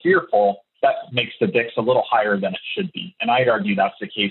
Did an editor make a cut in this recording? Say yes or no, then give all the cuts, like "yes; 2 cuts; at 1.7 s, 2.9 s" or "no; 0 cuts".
yes; 1 cut; at 0.9 s